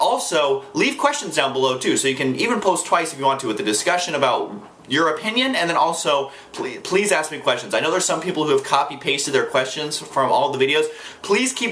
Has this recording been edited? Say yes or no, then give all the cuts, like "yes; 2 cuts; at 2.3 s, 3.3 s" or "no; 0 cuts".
yes; 1 cut; at 2.8 s